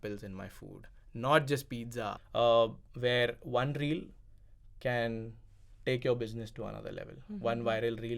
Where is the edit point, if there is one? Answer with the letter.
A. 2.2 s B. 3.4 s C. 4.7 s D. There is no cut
A